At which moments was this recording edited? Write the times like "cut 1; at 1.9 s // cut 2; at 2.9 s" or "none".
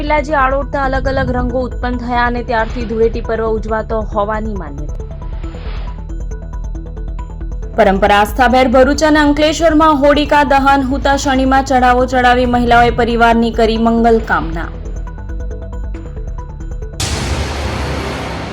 cut 1; at 16.8 s